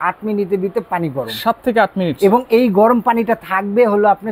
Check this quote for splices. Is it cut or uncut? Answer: uncut